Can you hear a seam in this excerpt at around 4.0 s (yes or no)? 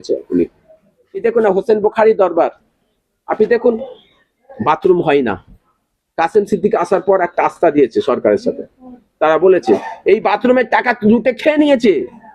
no